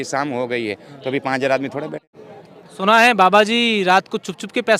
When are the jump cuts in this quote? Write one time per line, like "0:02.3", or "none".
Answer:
0:02.0